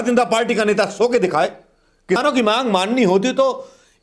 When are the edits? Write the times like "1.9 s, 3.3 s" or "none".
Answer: 2.2 s